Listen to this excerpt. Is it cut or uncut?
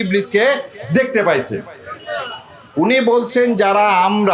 uncut